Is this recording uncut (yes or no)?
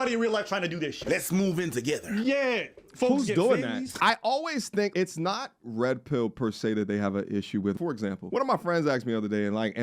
no